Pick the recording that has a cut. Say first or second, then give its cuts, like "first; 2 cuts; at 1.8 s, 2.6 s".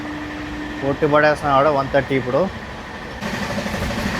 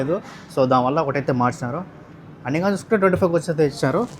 first; 1 cut; at 3.2 s